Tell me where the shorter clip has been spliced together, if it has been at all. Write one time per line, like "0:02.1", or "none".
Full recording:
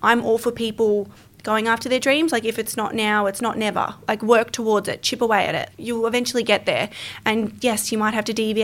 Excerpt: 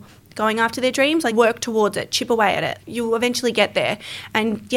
0:01.3